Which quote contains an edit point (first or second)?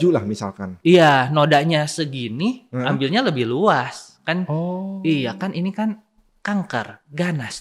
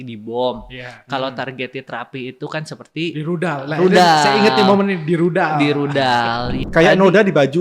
second